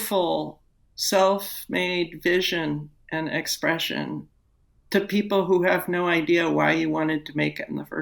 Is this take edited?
yes; 1 cut; at 4.8 s

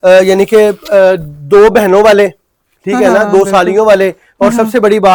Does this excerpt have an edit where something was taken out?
no; 0 cuts

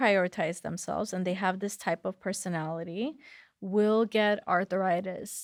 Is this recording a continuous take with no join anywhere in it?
yes; 0 cuts

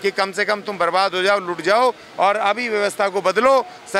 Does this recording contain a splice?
no; 0 cuts

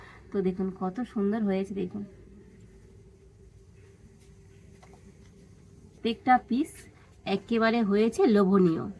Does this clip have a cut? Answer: yes; 1 cut; at 5.9 s

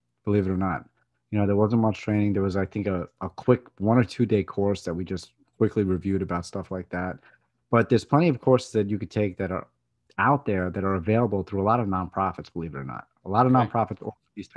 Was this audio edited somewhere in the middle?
no; 0 cuts

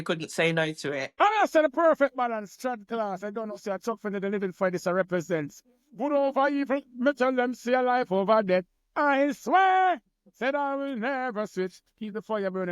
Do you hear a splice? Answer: yes; 1 cut; at 1.0 s

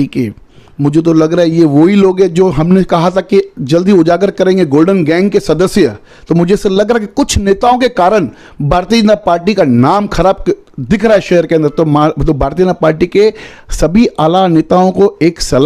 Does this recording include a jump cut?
no; 0 cuts

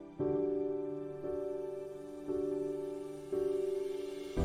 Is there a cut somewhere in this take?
no; 0 cuts

